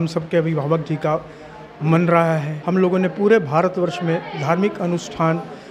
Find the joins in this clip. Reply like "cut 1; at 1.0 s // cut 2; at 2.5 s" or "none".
cut 1; at 2.5 s